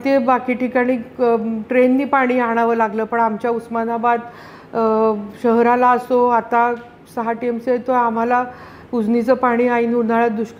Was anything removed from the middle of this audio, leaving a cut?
no; 0 cuts

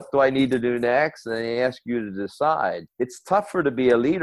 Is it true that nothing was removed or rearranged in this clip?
no; 1 cut; at 2.8 s

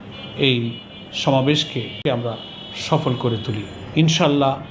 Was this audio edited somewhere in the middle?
yes; 2 cuts; at 2.0 s, 3.8 s

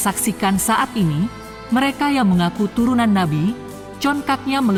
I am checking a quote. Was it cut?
no; 0 cuts

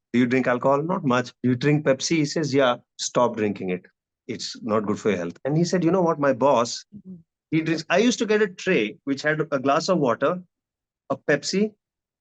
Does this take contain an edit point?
yes; 2 cuts; at 1.3 s, 2.9 s

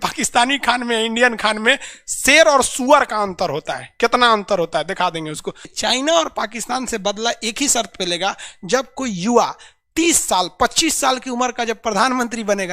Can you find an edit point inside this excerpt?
yes; 1 cut; at 5.7 s

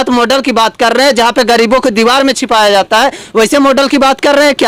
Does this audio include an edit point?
no; 0 cuts

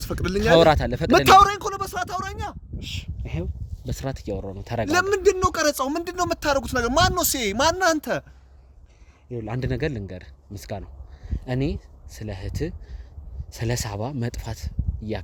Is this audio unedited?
yes; 0 cuts

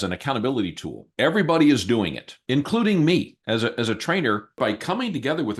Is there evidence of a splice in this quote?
yes; 1 cut; at 4.6 s

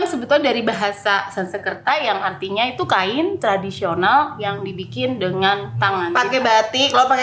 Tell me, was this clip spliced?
yes; 2 cuts; at 1.8 s, 6.1 s

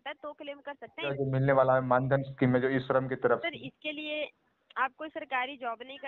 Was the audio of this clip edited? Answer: yes; 1 cut; at 1.1 s

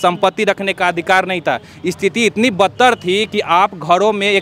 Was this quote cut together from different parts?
no; 0 cuts

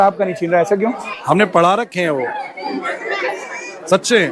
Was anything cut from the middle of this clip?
no; 0 cuts

